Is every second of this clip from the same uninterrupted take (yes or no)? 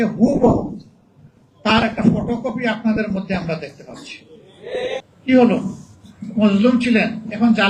no